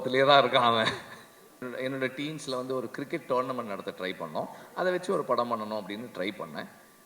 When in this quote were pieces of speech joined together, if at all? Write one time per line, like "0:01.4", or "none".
0:01.6